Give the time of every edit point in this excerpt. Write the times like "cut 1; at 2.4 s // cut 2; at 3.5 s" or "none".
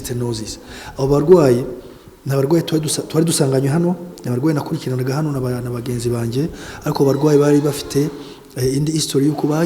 none